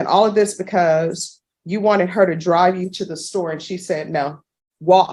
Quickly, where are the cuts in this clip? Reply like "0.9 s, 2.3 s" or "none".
none